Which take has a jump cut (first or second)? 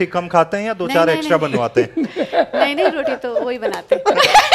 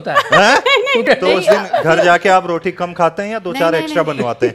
second